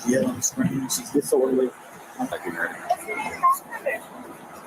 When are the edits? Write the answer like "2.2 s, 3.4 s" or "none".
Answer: 2.4 s